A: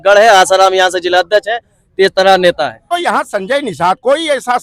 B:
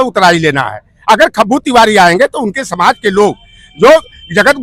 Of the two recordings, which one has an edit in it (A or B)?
A